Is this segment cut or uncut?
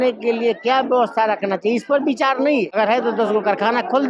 cut